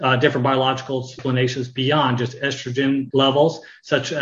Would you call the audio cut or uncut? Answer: cut